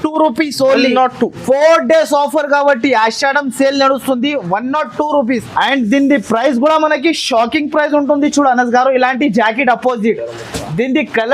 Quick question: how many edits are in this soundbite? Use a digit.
1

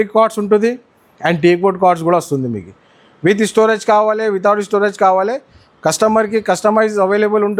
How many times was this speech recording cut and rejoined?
0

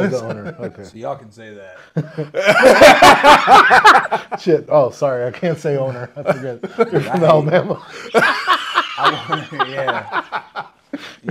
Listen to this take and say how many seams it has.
0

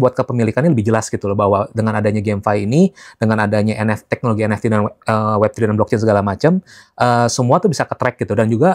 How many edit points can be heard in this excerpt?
0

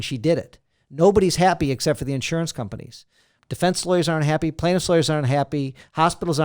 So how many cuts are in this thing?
1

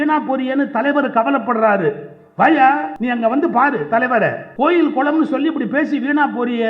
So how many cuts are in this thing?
2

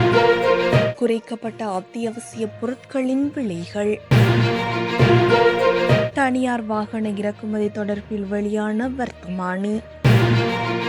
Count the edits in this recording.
4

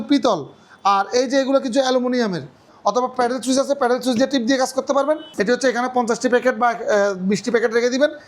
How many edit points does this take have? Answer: 2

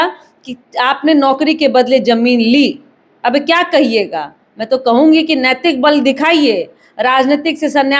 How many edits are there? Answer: 0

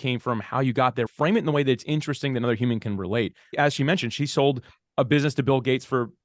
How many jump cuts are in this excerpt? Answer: 2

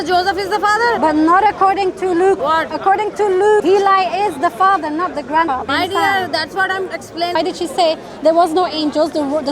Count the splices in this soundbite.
5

